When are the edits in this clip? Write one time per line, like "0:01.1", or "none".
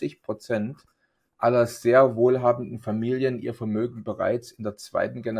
none